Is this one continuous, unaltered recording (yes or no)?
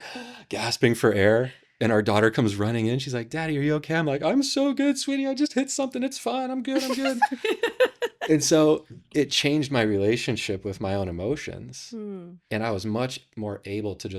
yes